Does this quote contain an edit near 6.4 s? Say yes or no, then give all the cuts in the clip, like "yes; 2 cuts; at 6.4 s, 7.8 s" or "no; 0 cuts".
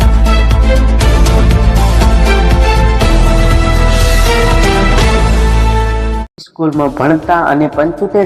yes; 1 cut; at 6.4 s